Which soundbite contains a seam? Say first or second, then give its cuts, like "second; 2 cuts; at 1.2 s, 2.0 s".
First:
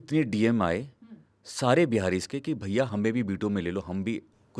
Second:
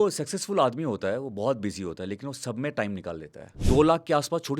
second; 1 cut; at 3.6 s